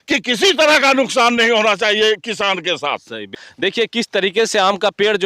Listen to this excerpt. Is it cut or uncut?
cut